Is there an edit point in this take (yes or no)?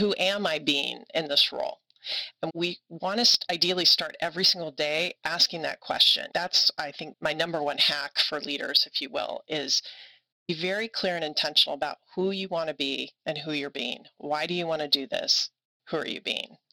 yes